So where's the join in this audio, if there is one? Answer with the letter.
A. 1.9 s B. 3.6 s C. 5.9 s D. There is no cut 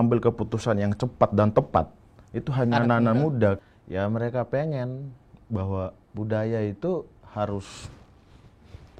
B